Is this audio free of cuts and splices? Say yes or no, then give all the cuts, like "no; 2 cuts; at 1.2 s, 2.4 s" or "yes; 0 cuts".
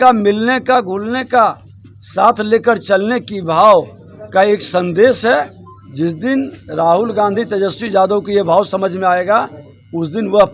yes; 0 cuts